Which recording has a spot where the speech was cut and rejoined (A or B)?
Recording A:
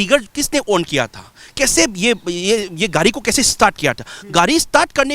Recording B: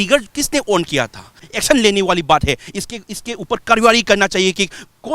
B